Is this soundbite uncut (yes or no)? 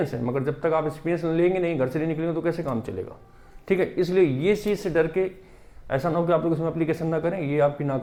yes